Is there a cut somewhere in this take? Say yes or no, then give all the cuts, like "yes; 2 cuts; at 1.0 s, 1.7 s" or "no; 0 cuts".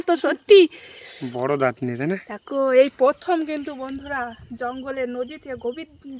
no; 0 cuts